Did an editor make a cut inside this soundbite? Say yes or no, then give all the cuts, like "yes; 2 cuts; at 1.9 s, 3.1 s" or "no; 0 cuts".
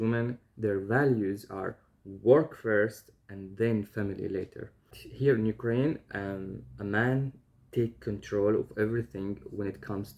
yes; 1 cut; at 5.0 s